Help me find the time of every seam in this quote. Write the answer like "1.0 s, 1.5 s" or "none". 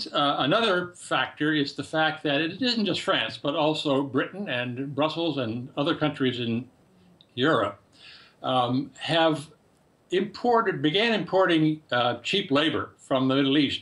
7.0 s